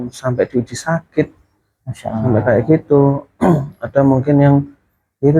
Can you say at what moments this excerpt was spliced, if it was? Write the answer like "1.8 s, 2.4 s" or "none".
none